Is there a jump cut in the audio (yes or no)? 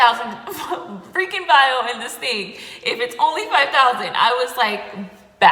no